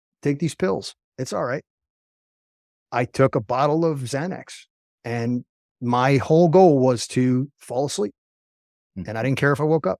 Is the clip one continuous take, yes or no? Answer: yes